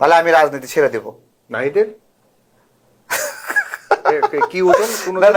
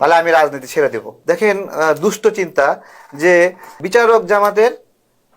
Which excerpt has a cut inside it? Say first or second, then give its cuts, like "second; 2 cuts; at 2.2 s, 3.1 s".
second; 2 cuts; at 1.1 s, 3.8 s